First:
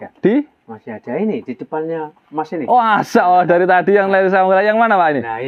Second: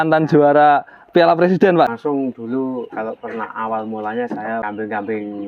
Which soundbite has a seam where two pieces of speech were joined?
second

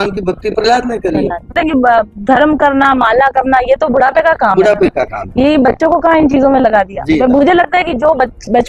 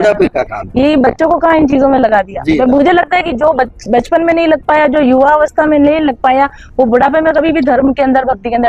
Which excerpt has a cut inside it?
first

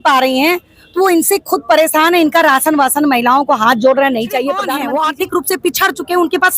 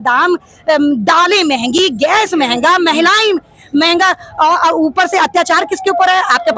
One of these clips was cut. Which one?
first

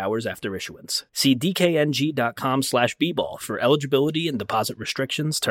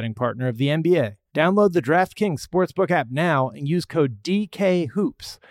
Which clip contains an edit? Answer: second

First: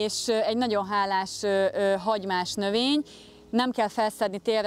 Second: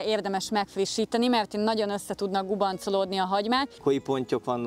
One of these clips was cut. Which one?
second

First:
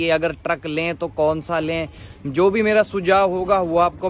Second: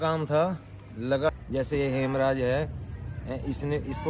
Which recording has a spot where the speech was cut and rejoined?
second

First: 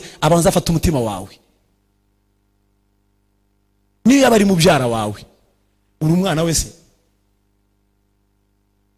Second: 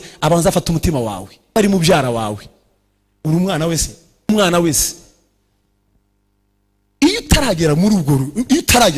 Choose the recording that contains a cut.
second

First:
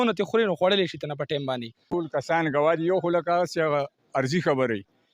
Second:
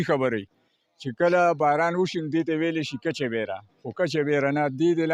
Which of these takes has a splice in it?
first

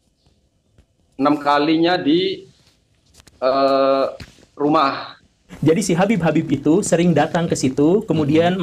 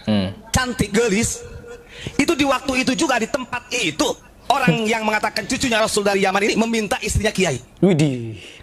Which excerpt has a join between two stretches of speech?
first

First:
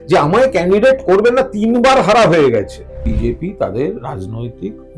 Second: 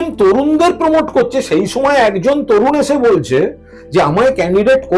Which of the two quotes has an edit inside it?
first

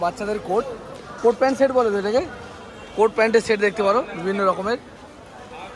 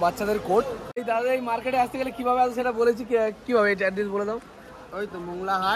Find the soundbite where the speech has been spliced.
second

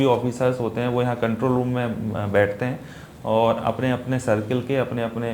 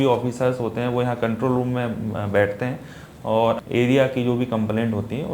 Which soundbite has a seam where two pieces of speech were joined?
second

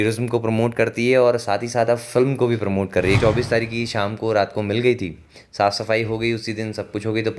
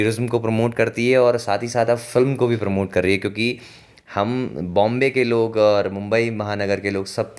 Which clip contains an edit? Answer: first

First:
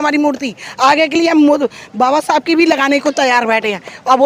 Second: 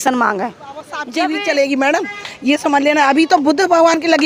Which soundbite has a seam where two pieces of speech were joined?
second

